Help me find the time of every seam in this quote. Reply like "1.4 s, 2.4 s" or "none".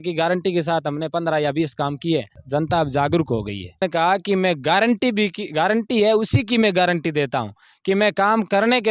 2.4 s, 3.8 s